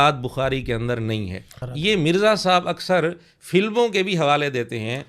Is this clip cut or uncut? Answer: cut